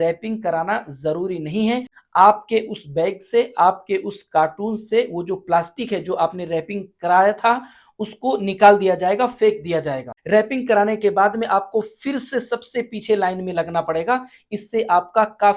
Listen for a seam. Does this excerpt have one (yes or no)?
yes